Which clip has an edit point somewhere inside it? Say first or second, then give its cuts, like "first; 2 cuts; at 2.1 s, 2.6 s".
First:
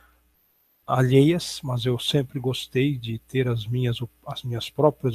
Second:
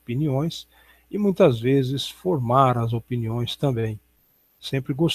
first; 1 cut; at 1.5 s